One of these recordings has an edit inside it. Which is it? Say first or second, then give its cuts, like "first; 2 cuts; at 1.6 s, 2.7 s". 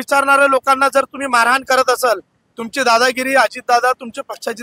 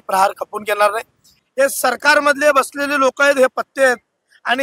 second; 1 cut; at 1.4 s